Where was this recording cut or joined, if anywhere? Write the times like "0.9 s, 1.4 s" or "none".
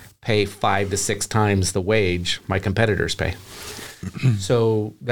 none

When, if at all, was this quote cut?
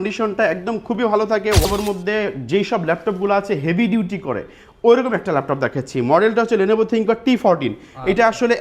1.6 s

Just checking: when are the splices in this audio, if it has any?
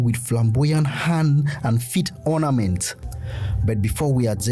3.0 s

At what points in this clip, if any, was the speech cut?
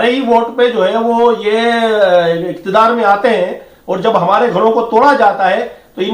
2.4 s

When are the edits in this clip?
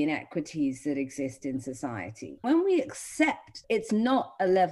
2.4 s, 3.6 s

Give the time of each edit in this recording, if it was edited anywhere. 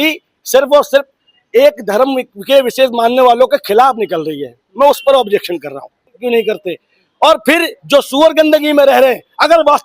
6.2 s

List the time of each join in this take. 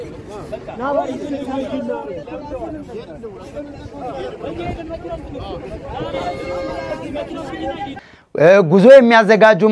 none

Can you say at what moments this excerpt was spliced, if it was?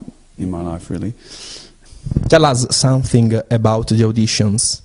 4.0 s

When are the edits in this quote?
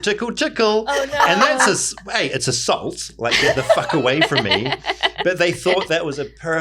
none

